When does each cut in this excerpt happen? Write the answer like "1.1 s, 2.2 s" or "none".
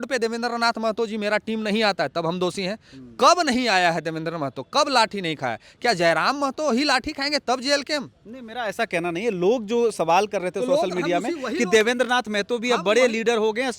none